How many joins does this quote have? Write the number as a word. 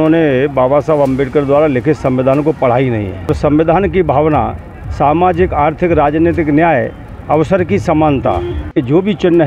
two